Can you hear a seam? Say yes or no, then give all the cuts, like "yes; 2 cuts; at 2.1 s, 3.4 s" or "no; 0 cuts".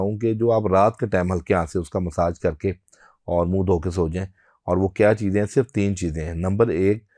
no; 0 cuts